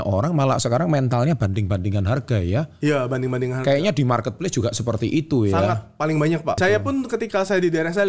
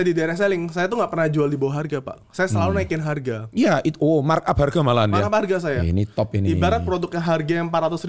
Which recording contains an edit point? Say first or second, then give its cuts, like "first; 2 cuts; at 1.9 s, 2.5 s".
first; 1 cut; at 6.6 s